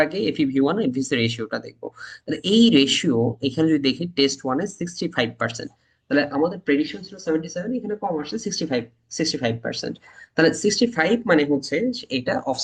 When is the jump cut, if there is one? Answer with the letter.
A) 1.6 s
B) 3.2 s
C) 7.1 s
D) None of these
D